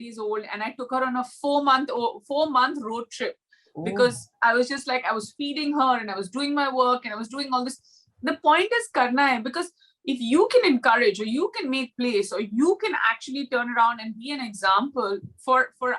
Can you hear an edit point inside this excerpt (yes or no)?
no